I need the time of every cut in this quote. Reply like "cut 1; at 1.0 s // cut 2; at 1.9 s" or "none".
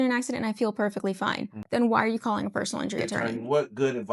cut 1; at 1.5 s // cut 2; at 3.2 s